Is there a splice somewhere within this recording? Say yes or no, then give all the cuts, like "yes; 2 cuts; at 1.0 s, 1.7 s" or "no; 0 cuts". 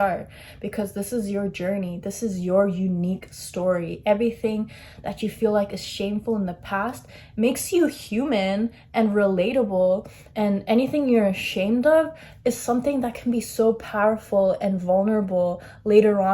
no; 0 cuts